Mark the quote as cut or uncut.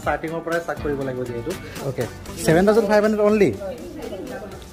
cut